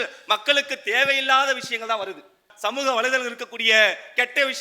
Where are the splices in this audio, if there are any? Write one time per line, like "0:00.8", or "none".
0:02.5